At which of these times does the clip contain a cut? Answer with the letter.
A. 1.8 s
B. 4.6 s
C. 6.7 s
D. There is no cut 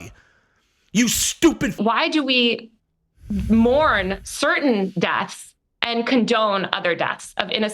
A